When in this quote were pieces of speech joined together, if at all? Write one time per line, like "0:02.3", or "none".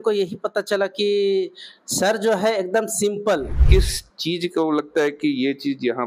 0:03.6

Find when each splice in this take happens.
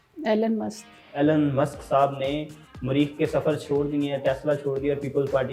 none

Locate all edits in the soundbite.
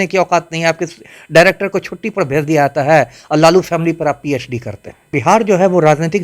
0:05.1

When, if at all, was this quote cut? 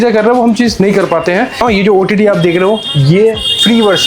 0:01.6

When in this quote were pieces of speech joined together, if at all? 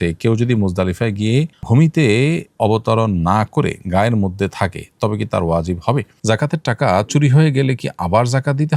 0:06.1

